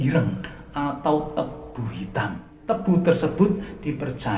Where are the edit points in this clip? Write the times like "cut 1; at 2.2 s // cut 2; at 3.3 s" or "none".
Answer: cut 1; at 2.5 s